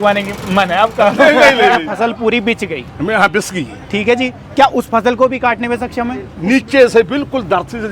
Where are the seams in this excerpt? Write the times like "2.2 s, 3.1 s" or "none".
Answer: 1.9 s, 6.3 s